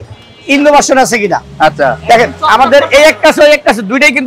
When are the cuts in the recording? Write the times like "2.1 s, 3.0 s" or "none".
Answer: none